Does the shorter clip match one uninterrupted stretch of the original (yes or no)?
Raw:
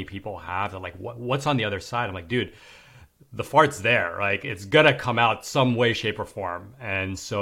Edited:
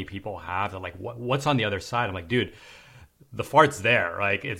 yes